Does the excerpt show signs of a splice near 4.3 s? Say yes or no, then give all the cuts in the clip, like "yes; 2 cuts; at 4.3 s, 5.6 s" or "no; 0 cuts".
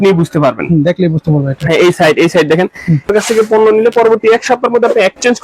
no; 1 cut; at 3.1 s